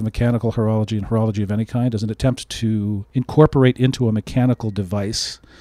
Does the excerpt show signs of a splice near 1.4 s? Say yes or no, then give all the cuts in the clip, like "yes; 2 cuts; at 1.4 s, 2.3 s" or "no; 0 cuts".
no; 1 cut; at 3.0 s